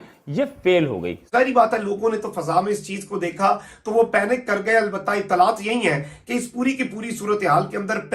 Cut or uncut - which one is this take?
cut